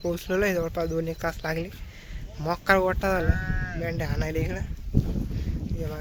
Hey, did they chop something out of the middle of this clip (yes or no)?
no